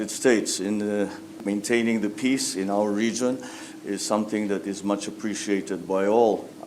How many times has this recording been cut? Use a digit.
1